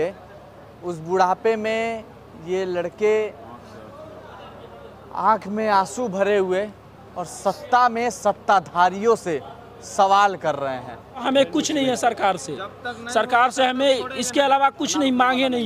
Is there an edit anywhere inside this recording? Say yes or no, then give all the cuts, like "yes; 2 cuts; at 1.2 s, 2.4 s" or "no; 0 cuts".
yes; 1 cut; at 11.2 s